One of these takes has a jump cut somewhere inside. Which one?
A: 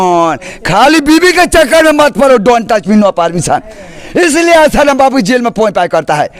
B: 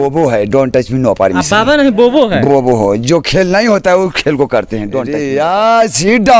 B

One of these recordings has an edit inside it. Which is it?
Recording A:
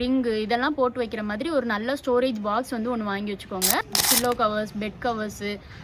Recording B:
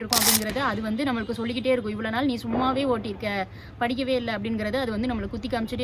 A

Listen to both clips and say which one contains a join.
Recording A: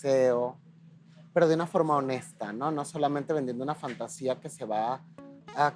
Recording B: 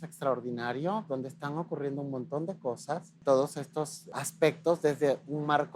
B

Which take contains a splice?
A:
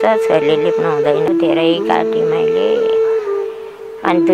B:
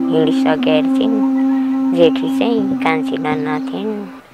A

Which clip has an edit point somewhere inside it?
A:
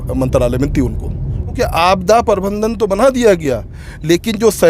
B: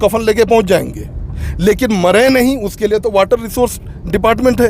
A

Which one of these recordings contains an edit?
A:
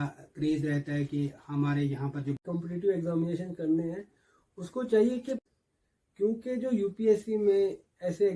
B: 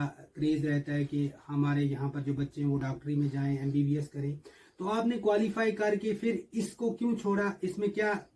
A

